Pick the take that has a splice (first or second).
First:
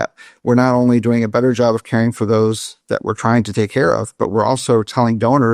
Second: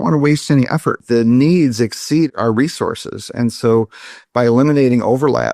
second